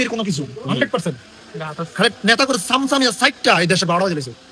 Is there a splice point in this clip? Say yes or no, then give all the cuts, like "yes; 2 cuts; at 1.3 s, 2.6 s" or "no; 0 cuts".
no; 0 cuts